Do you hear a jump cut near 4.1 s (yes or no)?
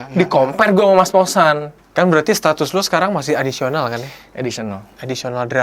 no